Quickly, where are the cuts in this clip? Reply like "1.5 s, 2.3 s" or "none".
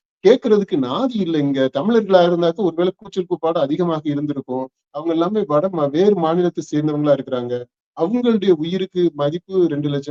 none